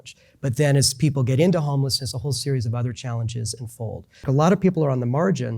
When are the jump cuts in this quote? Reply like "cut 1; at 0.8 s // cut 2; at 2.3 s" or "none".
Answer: cut 1; at 4.3 s